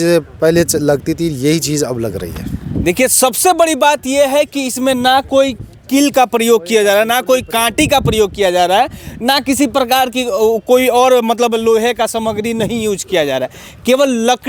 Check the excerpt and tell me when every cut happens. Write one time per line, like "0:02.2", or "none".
none